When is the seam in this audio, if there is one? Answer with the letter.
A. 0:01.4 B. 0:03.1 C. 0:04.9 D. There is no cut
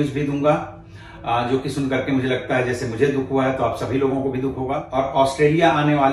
C